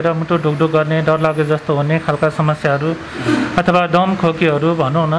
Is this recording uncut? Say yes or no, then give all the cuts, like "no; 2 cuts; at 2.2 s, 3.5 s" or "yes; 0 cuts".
yes; 0 cuts